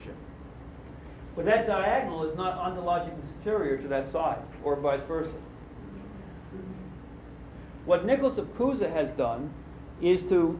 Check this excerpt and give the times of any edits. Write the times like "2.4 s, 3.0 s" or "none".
9.1 s